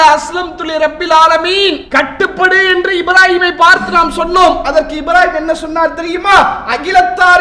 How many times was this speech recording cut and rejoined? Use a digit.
1